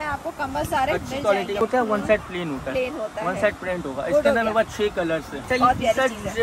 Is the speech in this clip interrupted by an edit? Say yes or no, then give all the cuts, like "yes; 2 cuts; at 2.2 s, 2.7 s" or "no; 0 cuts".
yes; 2 cuts; at 1.6 s, 5.4 s